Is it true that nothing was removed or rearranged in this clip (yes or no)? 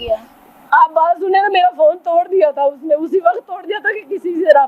yes